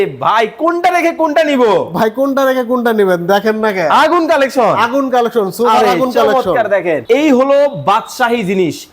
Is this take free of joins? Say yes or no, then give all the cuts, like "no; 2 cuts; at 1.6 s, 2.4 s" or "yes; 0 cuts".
no; 1 cut; at 7.0 s